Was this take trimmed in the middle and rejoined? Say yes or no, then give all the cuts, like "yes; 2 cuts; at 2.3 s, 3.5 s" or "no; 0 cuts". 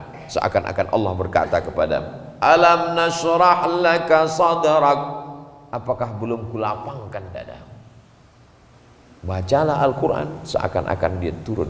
yes; 1 cut; at 8.7 s